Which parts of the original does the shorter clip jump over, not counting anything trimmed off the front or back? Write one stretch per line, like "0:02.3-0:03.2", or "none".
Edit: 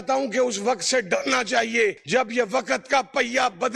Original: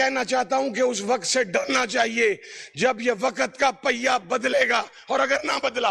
0:02.4-0:02.7

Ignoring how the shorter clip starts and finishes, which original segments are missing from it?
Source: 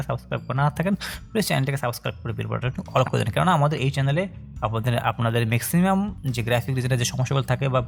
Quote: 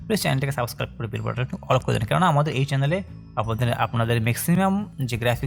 none

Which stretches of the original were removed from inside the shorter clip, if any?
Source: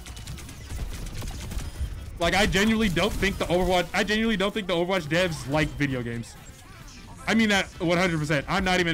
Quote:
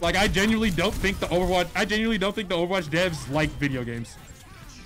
none

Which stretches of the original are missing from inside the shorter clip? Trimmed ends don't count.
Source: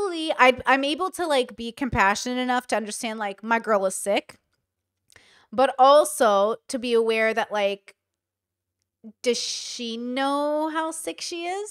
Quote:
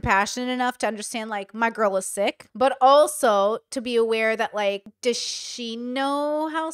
0:04.3-0:05.4
0:07.9-0:09.1

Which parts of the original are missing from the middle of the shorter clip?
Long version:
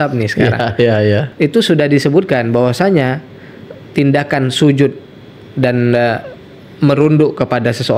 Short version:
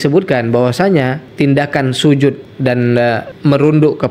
0:03.2-0:03.8
0:05.5-0:06.3

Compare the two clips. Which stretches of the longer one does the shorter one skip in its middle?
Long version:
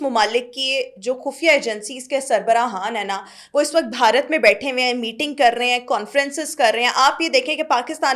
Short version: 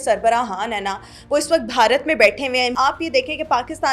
0:05.0-0:06.9

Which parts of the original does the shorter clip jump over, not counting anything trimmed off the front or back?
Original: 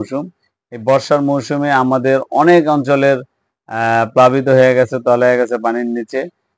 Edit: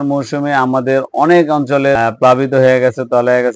0:03.2-0:03.9

